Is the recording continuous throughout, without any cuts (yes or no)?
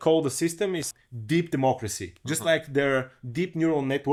yes